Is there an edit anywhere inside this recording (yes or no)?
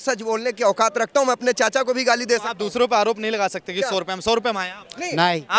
no